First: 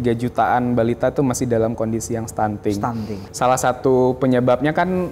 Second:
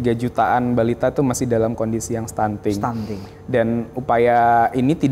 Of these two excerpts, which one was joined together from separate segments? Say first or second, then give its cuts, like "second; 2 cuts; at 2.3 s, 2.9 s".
first; 1 cut; at 3.2 s